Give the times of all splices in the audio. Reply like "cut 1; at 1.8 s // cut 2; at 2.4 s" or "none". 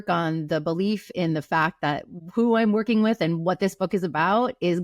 cut 1; at 2.1 s